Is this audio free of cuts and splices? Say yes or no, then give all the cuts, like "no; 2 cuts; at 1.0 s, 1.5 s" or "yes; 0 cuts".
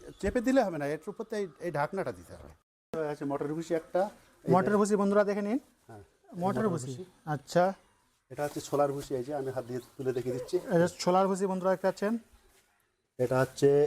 no; 1 cut; at 2.6 s